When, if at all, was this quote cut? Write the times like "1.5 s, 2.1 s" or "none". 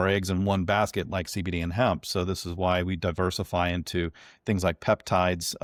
none